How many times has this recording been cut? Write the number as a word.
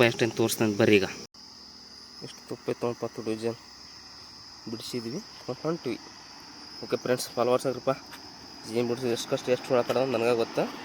one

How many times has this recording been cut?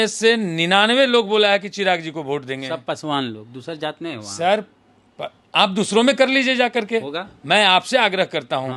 zero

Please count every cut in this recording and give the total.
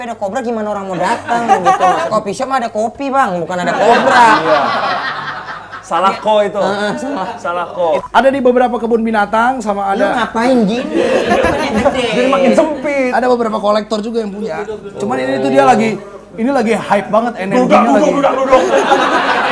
one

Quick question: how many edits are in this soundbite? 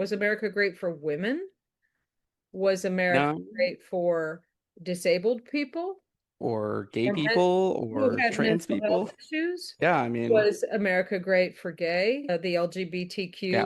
one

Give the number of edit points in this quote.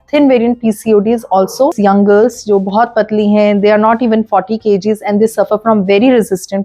one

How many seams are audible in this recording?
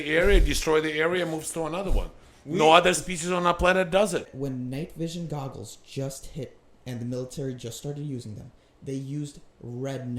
one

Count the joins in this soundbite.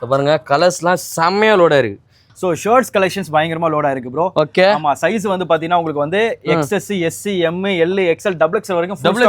one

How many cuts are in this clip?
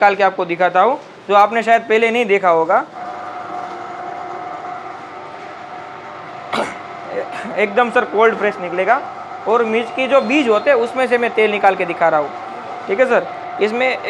zero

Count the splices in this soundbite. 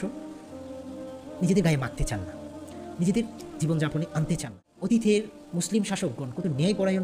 one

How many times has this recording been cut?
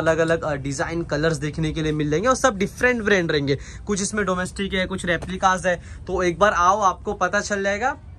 zero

